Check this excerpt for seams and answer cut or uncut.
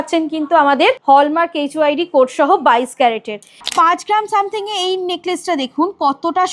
cut